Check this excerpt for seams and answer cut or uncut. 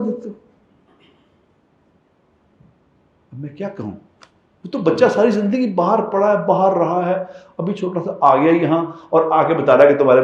uncut